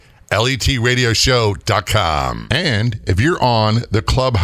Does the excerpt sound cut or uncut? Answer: cut